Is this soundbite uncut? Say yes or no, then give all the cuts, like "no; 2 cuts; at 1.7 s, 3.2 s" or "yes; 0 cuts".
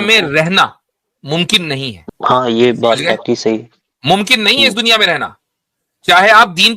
no; 1 cut; at 2.0 s